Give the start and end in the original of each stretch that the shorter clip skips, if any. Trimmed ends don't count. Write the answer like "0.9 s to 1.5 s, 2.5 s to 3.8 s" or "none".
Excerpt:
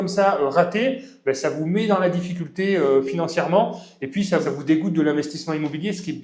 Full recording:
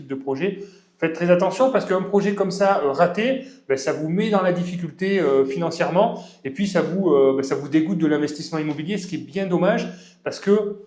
6.9 s to 7.5 s